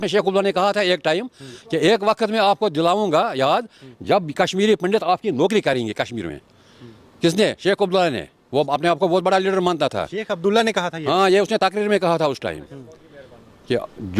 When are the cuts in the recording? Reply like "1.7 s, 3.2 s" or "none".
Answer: none